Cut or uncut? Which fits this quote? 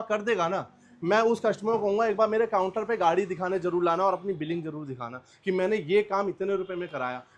uncut